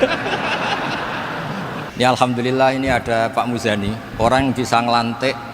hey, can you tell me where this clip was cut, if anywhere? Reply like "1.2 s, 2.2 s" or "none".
1.8 s